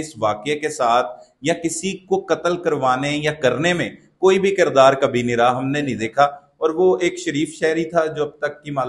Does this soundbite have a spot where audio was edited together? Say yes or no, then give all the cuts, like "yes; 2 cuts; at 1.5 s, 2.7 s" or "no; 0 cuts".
no; 0 cuts